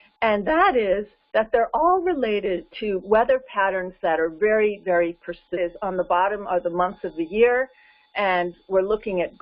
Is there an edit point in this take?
no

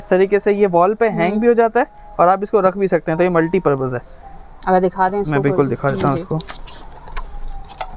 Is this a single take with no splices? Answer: yes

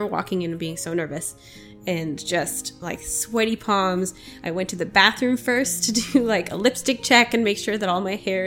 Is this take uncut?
yes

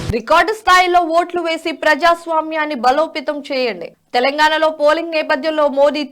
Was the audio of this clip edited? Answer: no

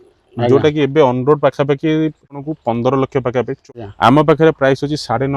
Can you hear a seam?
yes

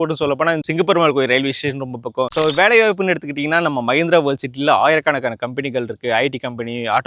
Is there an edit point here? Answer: yes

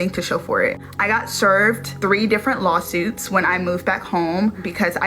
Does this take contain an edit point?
no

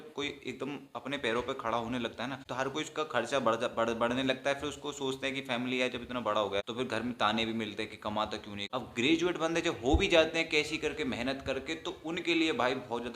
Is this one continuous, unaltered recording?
no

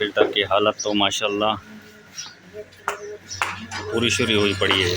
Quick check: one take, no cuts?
yes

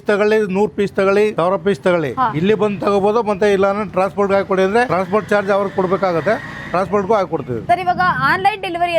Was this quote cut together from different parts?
no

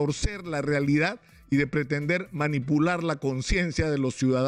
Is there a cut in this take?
no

